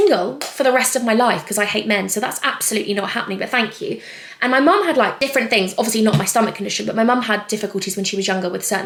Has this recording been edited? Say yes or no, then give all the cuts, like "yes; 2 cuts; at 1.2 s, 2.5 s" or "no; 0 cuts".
no; 0 cuts